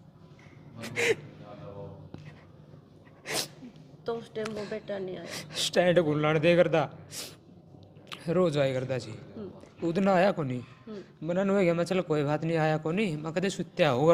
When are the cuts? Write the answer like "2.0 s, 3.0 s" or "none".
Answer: none